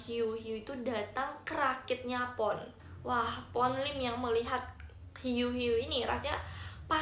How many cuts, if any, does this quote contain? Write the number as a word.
zero